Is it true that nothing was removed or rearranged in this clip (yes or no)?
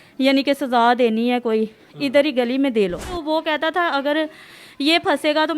no